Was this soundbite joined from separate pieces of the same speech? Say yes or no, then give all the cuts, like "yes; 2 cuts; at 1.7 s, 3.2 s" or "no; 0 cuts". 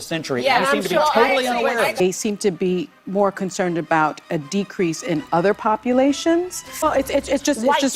yes; 2 cuts; at 1.9 s, 6.8 s